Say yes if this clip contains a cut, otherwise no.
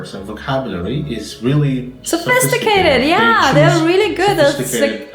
no